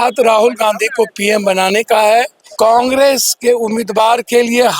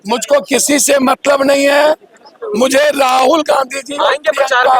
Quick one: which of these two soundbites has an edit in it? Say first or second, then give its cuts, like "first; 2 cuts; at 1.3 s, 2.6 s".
first; 1 cut; at 2.4 s